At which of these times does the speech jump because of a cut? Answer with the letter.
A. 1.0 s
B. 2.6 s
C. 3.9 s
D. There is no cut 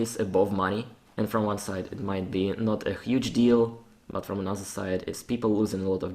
A